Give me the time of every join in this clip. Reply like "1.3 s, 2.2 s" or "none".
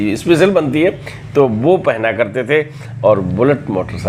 none